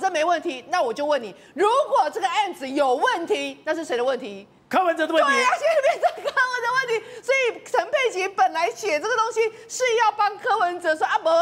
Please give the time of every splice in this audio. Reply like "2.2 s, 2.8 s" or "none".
none